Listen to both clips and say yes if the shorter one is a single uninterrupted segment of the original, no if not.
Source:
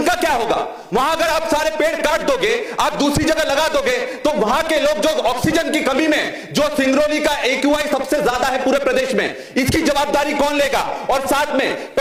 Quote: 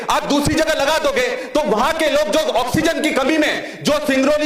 yes